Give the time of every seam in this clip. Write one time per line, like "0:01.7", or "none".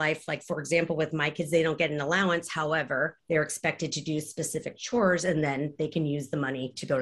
0:03.2